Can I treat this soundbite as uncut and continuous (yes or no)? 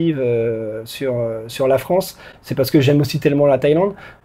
yes